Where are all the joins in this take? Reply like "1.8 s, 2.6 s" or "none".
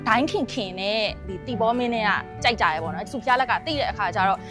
none